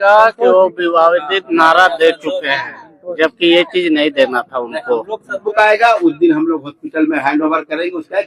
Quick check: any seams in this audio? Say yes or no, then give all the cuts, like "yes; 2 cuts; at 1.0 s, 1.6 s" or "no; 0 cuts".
yes; 1 cut; at 5.5 s